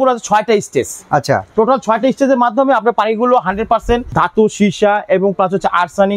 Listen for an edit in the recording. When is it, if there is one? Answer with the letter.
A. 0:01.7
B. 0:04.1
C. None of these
B